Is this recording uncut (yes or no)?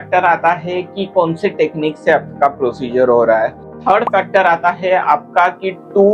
no